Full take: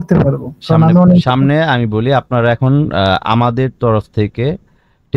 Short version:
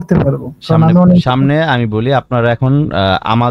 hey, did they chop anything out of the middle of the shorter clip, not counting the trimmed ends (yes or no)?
no